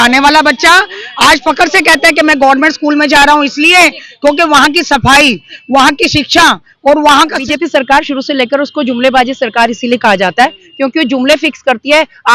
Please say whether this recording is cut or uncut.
cut